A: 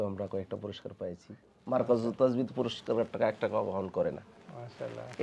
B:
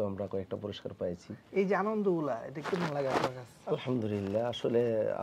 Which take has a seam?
A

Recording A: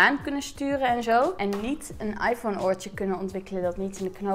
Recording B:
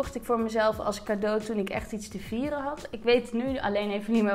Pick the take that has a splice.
A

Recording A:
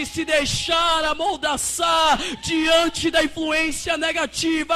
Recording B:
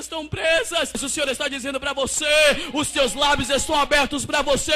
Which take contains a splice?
B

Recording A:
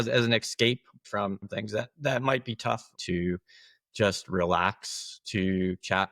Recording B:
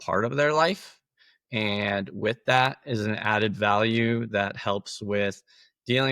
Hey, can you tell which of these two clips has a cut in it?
A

